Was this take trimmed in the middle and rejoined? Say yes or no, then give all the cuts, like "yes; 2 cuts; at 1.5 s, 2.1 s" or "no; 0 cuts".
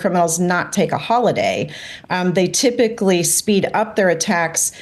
no; 0 cuts